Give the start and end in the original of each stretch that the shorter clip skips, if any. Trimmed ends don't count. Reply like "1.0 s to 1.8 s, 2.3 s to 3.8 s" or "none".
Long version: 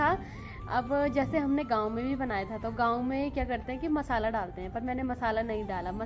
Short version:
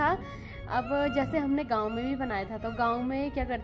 none